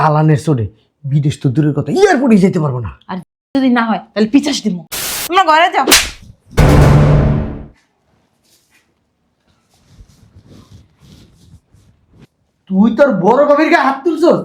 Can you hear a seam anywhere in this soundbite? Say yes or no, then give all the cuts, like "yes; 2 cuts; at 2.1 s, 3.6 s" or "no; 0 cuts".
yes; 1 cut; at 5.2 s